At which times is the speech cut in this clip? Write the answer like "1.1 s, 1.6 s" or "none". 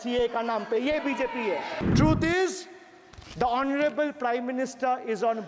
1.7 s